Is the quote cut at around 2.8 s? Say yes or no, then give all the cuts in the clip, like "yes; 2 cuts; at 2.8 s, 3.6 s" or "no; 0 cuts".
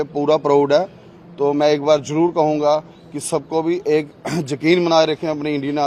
no; 0 cuts